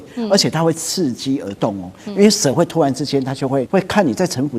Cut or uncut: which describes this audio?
cut